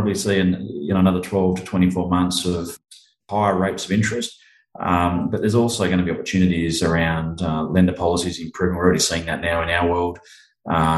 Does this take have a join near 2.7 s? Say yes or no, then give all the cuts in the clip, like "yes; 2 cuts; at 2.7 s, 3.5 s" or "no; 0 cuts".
yes; 1 cut; at 2.7 s